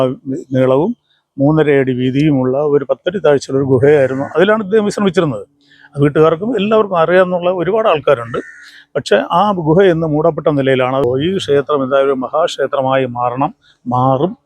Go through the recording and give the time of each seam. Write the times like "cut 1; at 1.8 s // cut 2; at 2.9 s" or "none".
cut 1; at 11.0 s